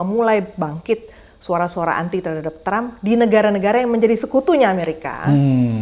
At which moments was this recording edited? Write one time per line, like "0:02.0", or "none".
none